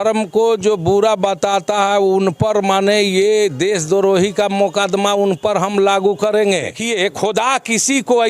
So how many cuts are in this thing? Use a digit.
1